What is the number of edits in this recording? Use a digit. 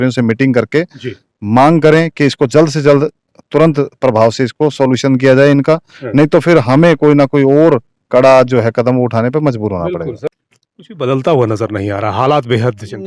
1